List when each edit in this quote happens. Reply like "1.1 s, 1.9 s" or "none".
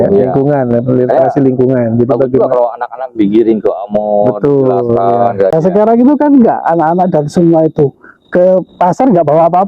5.5 s